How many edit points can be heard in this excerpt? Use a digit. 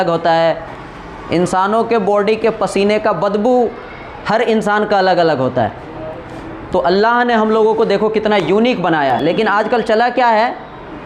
1